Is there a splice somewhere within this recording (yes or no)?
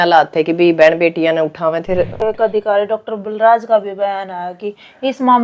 yes